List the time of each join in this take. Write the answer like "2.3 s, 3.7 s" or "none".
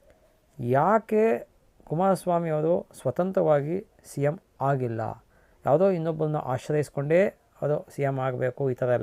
none